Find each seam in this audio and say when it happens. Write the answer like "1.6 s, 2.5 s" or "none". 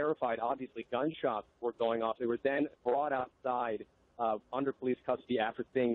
3.1 s